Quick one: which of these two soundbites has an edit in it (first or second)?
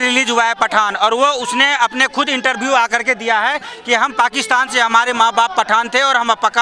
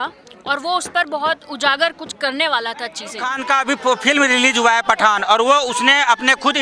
second